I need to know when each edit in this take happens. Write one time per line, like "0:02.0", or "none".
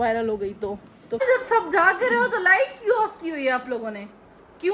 0:01.0

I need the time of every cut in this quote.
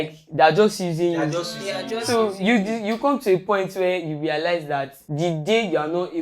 0:05.0

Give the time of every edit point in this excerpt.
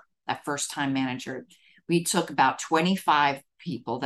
none

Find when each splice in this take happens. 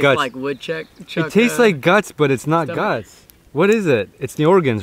none

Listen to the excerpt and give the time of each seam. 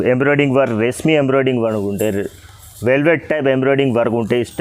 none

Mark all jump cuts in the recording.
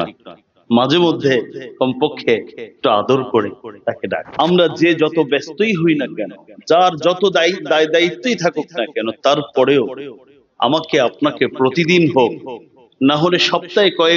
0:04.3

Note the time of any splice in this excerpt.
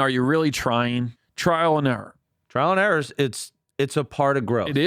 0:01.2

